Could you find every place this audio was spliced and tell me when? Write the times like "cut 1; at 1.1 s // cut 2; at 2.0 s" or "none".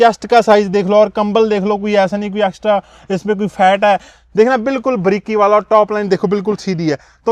none